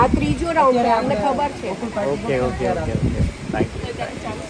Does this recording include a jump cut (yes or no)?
no